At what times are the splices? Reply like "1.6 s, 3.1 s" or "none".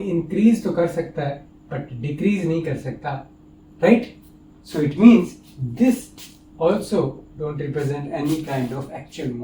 none